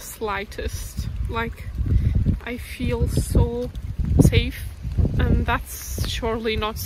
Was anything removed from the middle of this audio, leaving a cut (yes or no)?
yes